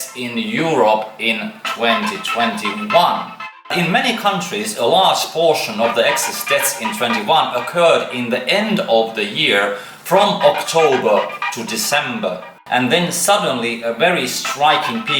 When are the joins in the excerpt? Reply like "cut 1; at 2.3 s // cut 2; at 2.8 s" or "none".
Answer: cut 1; at 3.7 s // cut 2; at 12.6 s

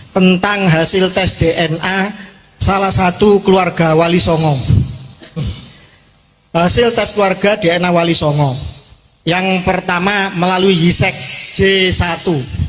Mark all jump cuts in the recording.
cut 1; at 5.4 s

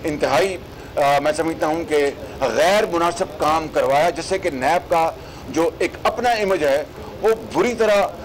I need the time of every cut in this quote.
none

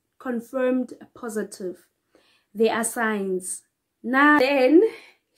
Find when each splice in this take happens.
cut 1; at 4.4 s

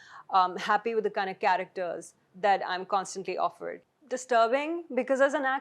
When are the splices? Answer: cut 1; at 3.8 s

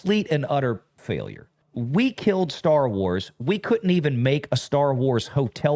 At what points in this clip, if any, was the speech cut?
cut 1; at 1.0 s

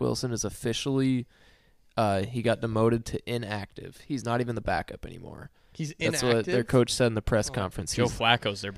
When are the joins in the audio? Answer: none

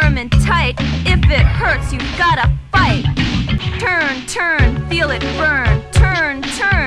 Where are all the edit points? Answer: cut 1; at 3.7 s

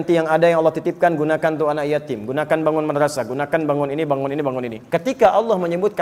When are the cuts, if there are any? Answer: cut 1; at 4.8 s

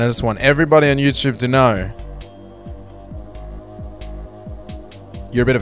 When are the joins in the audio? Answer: none

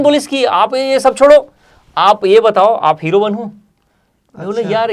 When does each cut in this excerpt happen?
none

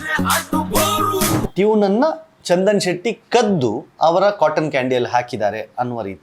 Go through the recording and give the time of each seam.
cut 1; at 1.5 s

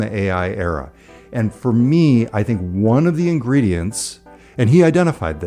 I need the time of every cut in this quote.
none

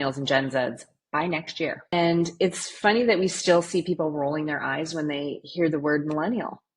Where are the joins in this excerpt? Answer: cut 1; at 1.9 s

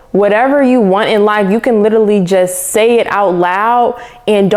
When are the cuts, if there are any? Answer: none

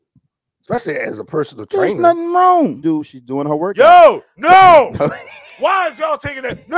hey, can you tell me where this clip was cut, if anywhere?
cut 1; at 2.8 s

